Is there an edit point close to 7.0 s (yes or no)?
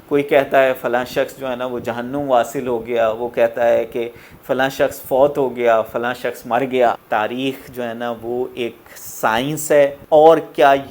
yes